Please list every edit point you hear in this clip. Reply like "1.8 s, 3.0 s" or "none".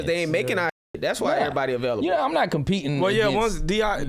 none